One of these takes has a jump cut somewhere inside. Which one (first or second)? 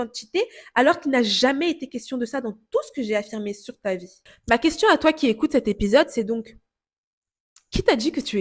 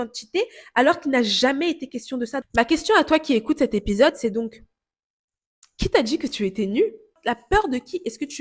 second